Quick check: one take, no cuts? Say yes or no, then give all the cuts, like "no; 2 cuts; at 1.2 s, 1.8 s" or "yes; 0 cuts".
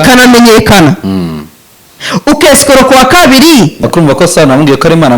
no; 1 cut; at 3.8 s